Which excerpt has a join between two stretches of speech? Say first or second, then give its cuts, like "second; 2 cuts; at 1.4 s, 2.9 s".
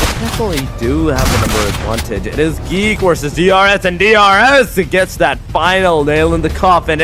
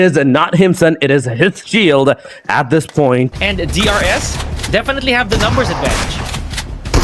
second; 1 cut; at 3.3 s